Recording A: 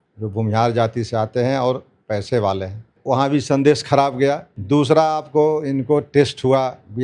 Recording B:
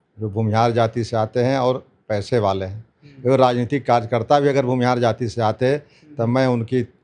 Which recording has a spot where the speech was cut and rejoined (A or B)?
A